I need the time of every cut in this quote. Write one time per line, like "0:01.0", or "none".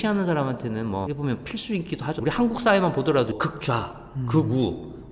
0:02.2